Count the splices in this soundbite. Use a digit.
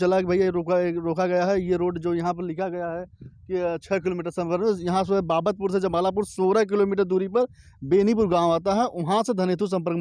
0